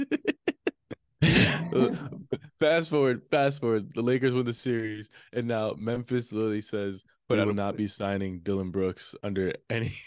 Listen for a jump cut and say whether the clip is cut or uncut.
uncut